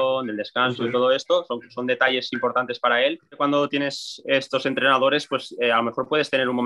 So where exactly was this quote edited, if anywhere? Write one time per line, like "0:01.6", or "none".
0:03.3